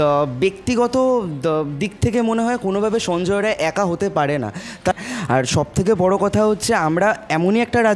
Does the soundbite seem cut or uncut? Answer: cut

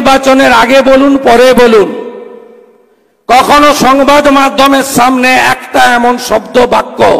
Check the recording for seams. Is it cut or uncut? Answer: uncut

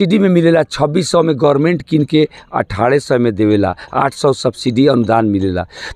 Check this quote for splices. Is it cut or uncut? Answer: uncut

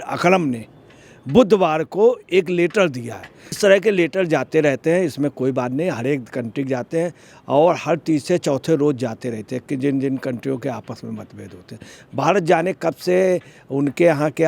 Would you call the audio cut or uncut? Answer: uncut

